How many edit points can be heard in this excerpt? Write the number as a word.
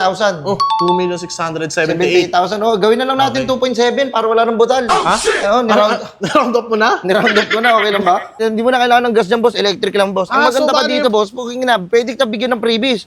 one